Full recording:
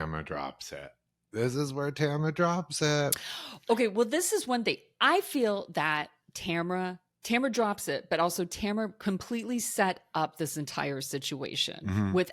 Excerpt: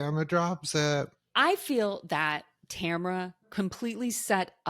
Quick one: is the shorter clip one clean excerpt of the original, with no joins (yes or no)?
no